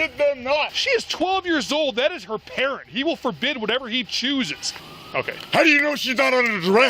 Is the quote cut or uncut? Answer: cut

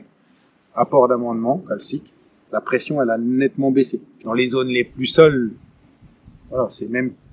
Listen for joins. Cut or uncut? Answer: cut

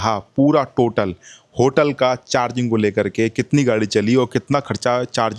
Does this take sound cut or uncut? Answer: uncut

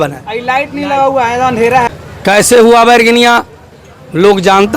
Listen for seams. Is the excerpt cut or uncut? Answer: cut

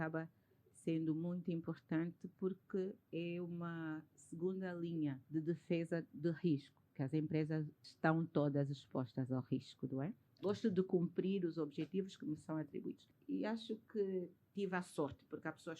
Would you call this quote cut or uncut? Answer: cut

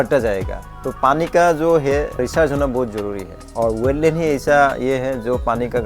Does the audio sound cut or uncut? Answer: cut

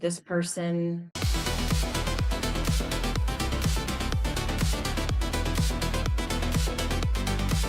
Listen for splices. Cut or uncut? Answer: cut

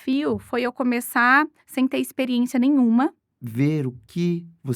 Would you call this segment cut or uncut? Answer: cut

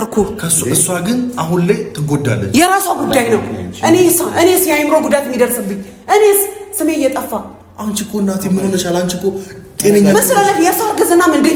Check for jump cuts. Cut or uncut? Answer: uncut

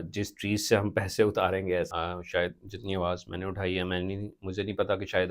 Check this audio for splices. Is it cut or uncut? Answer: cut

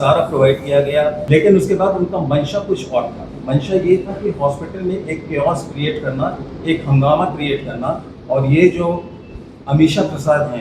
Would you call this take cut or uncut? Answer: cut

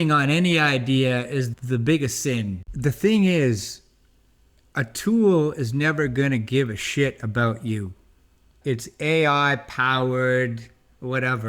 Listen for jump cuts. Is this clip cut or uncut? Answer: cut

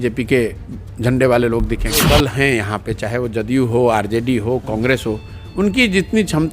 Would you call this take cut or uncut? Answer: cut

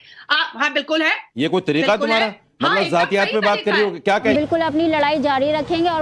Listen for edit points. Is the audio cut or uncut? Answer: cut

